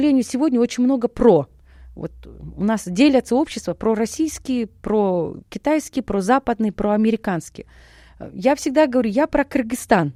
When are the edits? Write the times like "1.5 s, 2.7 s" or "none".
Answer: none